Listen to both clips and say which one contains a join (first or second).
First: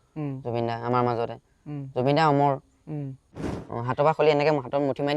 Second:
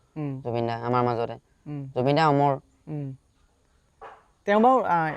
first